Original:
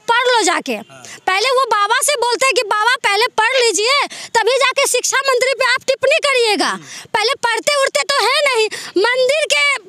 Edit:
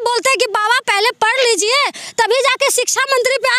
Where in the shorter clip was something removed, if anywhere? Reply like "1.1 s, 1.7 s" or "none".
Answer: none